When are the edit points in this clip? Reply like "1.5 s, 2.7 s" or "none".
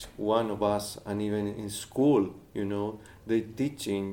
none